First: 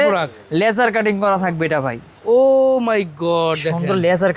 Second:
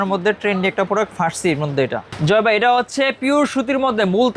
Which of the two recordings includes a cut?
second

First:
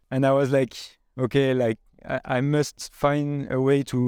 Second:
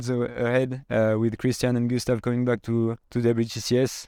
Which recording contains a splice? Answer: second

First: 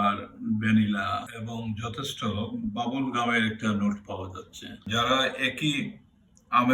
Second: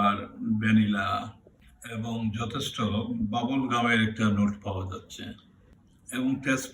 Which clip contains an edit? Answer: first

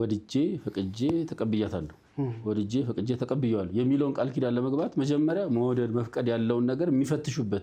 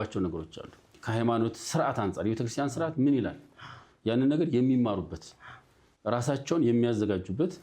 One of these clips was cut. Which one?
second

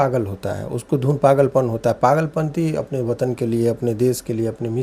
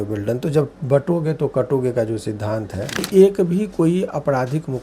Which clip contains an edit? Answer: second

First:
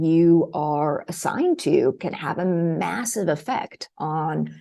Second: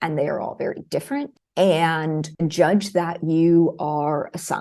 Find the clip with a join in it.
second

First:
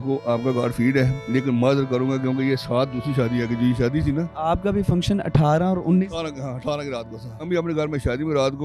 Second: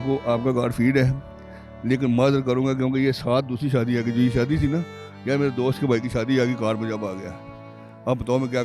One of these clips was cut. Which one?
first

